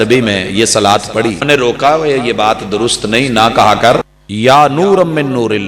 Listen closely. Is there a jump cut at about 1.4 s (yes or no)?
yes